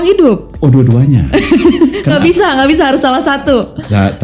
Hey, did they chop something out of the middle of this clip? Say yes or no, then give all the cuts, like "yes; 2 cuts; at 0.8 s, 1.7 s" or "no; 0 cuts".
no; 0 cuts